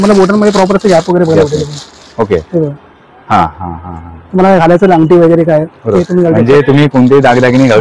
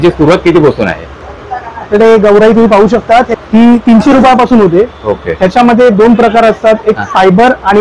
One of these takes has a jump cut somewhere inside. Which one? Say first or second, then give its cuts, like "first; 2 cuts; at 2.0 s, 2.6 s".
second; 1 cut; at 3.3 s